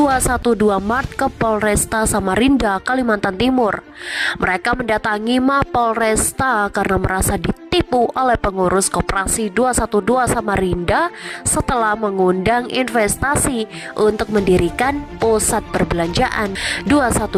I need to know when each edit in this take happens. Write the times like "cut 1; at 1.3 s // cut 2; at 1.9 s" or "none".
none